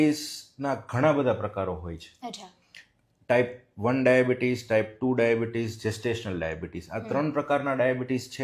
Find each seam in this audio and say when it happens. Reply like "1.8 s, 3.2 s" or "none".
none